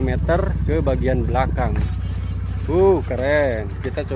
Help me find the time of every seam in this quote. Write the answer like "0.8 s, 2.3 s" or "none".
1.8 s